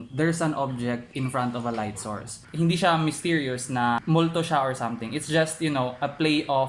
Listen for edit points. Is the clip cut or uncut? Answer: uncut